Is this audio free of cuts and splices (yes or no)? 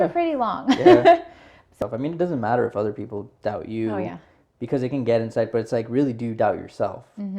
no